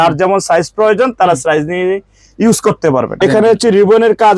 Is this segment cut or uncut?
cut